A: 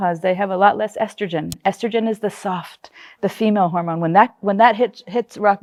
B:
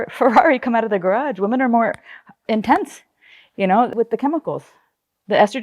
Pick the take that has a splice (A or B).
B